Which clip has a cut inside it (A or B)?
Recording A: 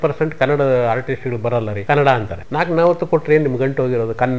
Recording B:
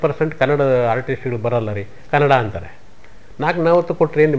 A